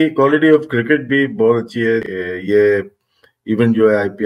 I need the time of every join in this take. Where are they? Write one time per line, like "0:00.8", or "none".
0:02.1